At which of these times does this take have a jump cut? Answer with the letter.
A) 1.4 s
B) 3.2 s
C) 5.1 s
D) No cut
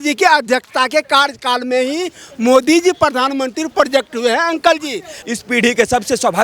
C